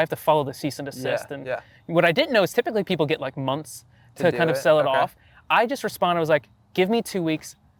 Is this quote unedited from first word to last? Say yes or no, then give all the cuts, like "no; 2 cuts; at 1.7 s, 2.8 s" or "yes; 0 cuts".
yes; 0 cuts